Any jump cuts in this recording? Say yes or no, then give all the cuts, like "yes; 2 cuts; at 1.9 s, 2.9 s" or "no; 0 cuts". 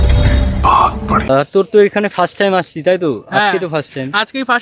yes; 1 cut; at 1.3 s